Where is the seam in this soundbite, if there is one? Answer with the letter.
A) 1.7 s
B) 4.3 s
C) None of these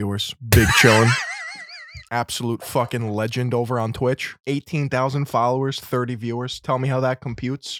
B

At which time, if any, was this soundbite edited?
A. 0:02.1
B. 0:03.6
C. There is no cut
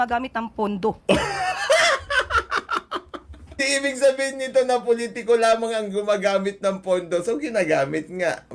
B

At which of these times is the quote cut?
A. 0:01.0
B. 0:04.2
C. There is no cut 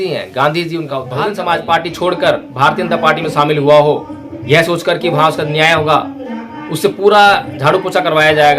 A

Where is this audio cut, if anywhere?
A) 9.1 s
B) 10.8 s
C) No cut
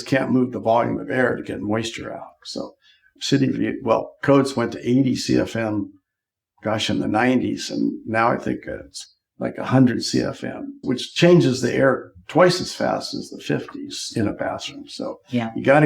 B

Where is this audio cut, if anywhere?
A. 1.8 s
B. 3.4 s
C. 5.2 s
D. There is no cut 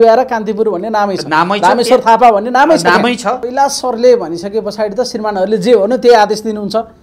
B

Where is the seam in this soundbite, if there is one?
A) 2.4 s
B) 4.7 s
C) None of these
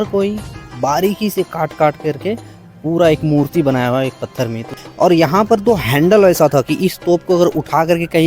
B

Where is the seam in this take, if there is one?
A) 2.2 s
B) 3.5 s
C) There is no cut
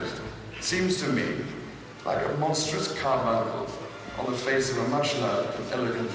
C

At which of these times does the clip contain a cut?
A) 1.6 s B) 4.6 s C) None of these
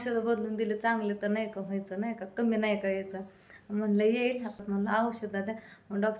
B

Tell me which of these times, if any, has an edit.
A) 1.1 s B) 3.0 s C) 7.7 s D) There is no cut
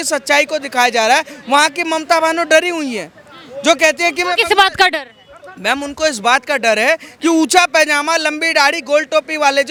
D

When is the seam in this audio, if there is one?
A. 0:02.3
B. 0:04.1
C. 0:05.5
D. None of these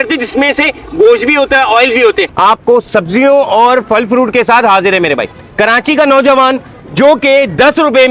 A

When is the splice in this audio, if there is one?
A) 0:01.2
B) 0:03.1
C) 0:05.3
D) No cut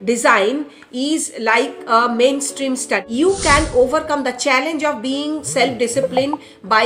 B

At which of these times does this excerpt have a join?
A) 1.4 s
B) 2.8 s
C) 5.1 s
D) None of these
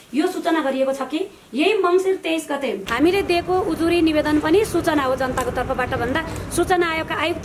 B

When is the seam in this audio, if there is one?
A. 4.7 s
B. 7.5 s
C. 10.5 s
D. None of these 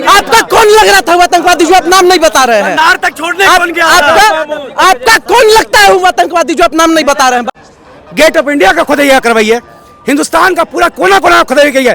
B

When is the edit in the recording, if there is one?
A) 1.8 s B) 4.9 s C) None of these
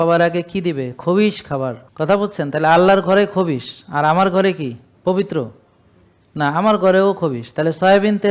A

